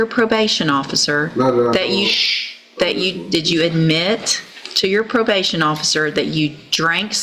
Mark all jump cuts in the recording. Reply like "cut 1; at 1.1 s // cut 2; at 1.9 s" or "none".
none